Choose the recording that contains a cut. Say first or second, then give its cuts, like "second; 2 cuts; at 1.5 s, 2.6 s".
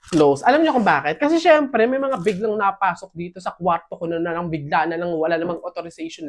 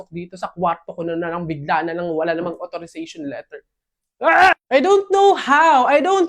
second; 1 cut; at 4.6 s